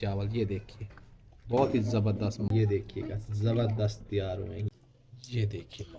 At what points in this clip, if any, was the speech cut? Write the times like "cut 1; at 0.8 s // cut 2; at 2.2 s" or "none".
cut 1; at 2.5 s // cut 2; at 4.6 s